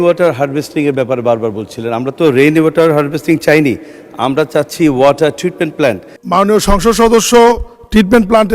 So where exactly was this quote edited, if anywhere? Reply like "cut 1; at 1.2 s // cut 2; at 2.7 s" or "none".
cut 1; at 6.1 s